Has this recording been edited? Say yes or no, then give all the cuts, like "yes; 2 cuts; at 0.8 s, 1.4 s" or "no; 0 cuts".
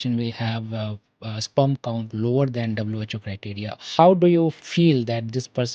yes; 2 cuts; at 3.8 s, 4.6 s